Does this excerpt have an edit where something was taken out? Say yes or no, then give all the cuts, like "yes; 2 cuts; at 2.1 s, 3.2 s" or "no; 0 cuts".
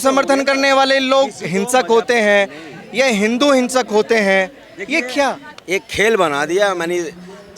yes; 1 cut; at 5.5 s